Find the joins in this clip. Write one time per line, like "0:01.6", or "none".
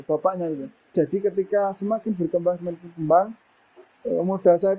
0:00.9